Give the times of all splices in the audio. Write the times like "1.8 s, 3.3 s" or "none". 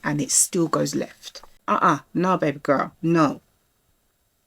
1.5 s